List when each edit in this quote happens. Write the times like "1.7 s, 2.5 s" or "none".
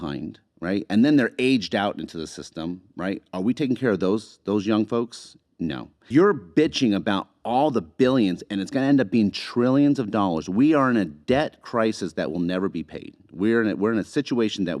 5.9 s